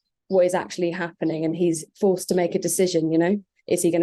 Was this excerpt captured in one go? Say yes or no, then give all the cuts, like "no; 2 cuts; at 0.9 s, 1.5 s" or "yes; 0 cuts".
yes; 0 cuts